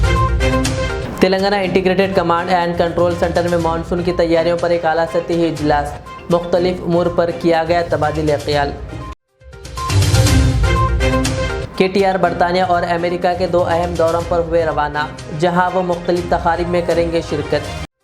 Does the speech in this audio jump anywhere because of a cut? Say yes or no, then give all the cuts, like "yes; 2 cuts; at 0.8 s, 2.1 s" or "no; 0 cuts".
yes; 1 cut; at 1.0 s